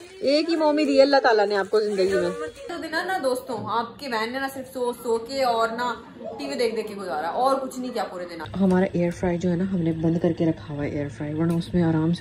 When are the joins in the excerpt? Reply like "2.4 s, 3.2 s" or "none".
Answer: 2.7 s, 8.4 s

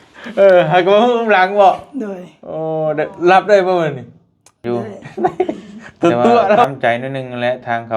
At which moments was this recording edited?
6.6 s

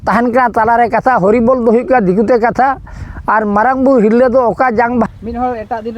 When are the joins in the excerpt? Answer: 5.0 s

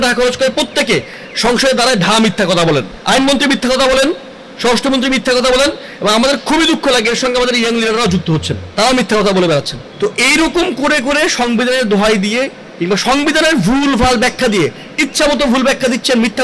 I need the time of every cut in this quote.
2.9 s, 8.6 s, 9.8 s

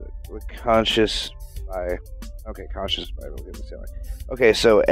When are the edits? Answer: none

